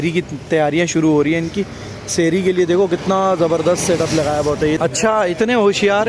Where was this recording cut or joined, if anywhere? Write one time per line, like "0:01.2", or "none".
0:04.8